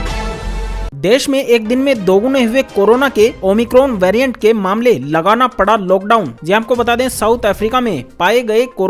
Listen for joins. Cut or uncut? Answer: uncut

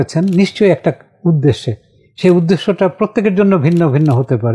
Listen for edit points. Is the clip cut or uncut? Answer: uncut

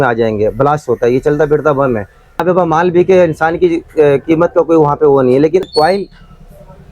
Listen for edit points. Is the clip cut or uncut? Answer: cut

